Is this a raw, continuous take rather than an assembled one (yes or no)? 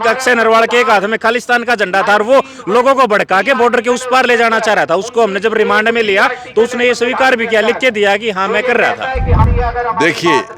no